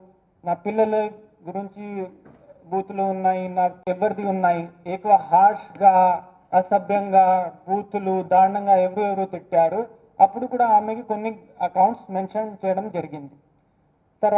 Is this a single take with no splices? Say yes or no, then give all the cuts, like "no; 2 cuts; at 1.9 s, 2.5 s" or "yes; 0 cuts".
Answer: no; 1 cut; at 3.8 s